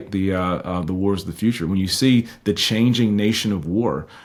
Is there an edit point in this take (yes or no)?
no